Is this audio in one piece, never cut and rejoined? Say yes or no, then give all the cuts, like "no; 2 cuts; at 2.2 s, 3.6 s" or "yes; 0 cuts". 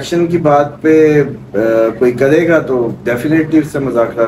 yes; 0 cuts